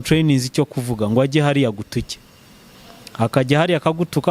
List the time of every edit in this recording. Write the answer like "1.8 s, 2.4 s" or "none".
none